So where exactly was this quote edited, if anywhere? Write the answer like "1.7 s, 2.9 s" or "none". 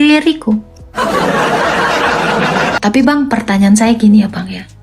2.8 s